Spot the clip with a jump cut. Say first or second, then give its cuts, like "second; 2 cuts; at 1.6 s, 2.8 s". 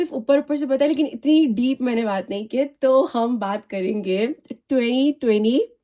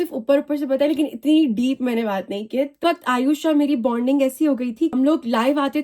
second; 2 cuts; at 2.8 s, 4.9 s